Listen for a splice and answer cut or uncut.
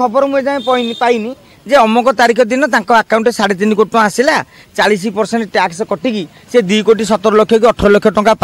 uncut